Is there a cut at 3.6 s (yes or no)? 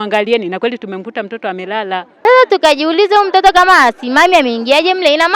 no